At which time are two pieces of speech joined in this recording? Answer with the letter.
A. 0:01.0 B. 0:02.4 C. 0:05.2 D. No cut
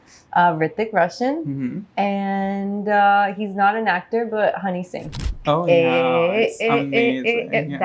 C